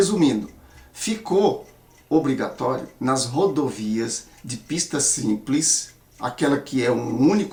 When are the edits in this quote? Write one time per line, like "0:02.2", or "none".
none